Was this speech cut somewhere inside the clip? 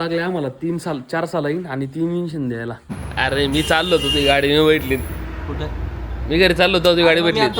yes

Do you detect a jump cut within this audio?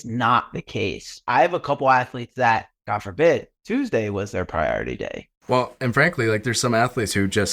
yes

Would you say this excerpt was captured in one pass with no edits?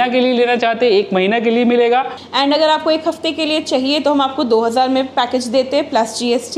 no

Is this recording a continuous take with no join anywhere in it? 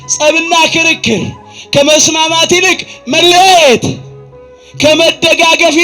yes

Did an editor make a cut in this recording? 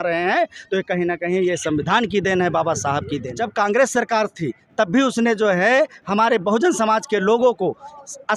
yes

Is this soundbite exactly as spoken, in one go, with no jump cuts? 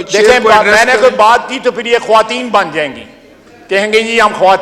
yes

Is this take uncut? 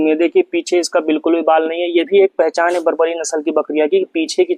yes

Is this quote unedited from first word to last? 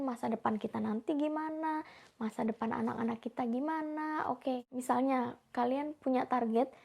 yes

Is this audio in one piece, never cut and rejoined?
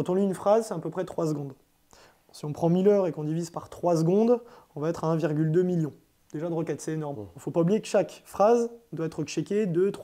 yes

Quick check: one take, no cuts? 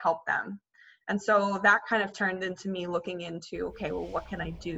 yes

